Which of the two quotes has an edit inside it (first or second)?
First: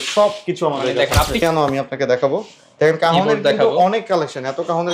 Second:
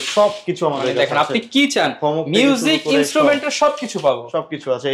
first